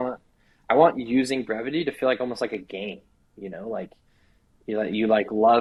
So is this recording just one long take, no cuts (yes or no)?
yes